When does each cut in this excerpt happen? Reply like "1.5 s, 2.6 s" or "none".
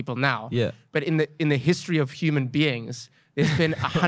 none

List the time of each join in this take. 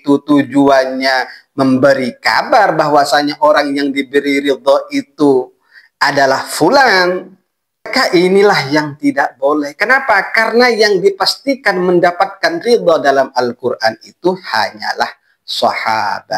7.9 s

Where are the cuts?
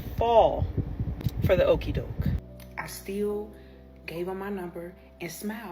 2.4 s

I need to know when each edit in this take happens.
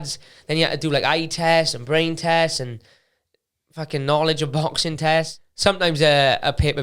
5.4 s

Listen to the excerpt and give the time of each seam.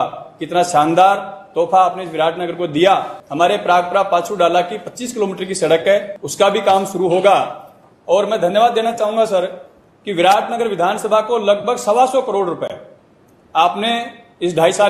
3.2 s, 6.2 s

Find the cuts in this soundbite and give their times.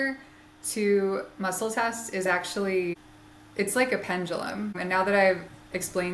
3.1 s, 4.8 s

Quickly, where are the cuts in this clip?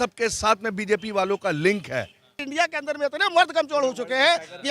2.4 s

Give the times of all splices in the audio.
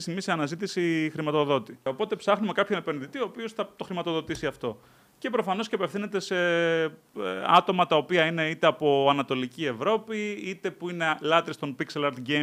1.8 s

